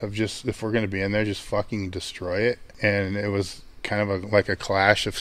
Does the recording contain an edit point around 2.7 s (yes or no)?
yes